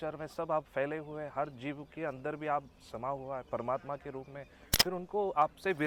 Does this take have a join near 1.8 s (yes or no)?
no